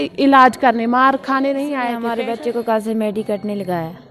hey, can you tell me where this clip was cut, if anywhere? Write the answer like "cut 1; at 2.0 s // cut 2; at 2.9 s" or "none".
cut 1; at 1.9 s

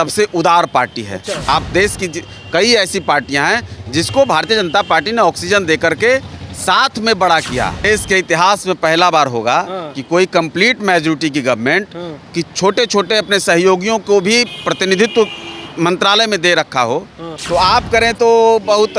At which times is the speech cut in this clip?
cut 1; at 1.4 s // cut 2; at 7.9 s // cut 3; at 17.3 s

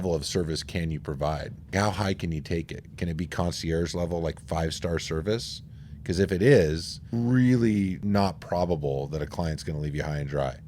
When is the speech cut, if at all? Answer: cut 1; at 1.7 s // cut 2; at 7.1 s // cut 3; at 8.0 s

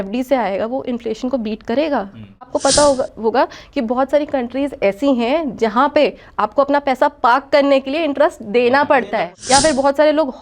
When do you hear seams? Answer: cut 1; at 2.5 s // cut 2; at 9.3 s

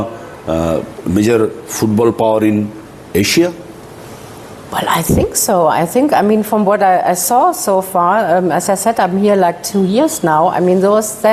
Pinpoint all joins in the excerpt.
none

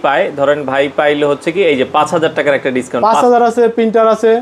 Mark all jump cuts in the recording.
none

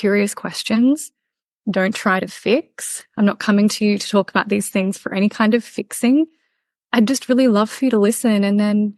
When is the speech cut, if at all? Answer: none

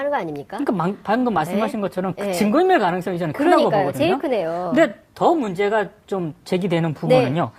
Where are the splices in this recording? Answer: none

